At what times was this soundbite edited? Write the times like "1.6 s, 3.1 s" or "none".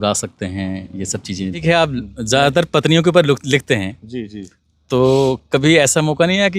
1.6 s